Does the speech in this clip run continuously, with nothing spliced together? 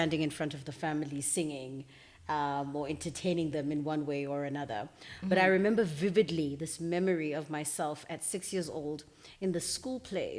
yes; 0 cuts

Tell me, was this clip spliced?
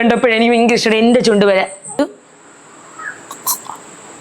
yes; 1 cut; at 2.0 s

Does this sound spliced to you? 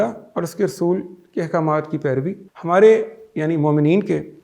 yes; 1 cut; at 2.5 s

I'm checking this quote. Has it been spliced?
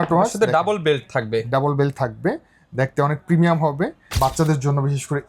yes; 1 cut; at 4.0 s

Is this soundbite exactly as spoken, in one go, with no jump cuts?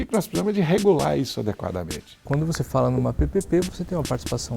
no; 2 cuts; at 2.2 s, 3.7 s

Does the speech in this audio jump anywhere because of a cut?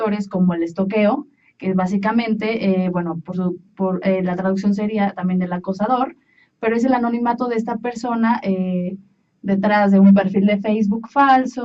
no; 0 cuts

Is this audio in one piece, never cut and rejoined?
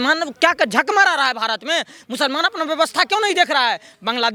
yes; 0 cuts

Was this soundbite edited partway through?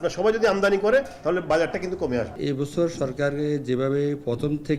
yes; 1 cut; at 2.3 s

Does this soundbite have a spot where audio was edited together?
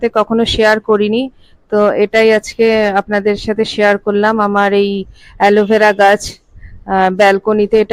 no; 0 cuts

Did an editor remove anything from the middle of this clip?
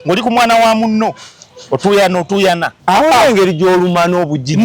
yes; 1 cut; at 2.7 s

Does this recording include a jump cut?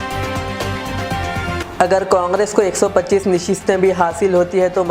yes; 1 cut; at 1.6 s

